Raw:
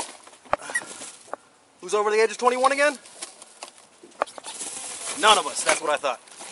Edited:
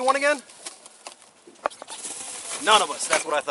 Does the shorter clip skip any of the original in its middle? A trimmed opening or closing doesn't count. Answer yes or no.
no